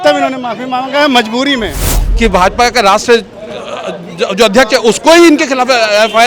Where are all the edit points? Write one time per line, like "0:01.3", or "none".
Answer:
0:02.0